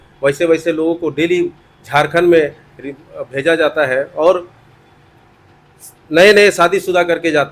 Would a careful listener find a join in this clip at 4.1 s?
no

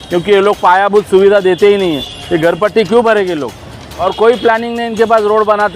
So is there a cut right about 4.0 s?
yes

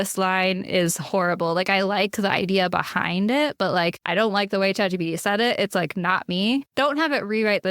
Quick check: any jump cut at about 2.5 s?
no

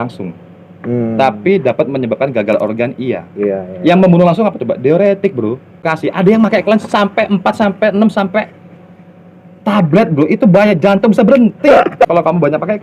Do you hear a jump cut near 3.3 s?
no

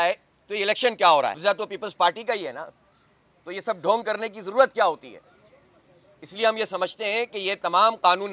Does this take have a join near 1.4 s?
yes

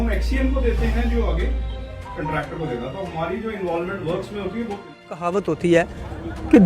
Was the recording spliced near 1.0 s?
no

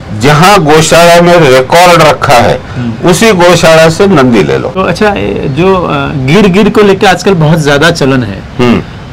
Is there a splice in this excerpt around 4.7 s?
yes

